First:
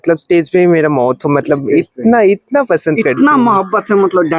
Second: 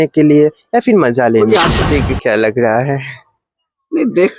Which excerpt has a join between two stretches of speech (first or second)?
second